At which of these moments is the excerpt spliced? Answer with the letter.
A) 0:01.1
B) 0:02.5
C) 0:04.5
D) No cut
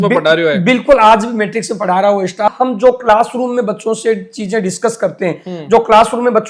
B